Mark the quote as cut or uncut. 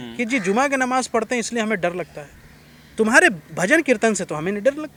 uncut